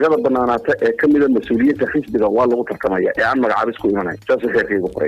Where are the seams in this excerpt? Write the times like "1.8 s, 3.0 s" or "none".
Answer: 4.2 s